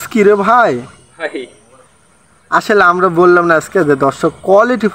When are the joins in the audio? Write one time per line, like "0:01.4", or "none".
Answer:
none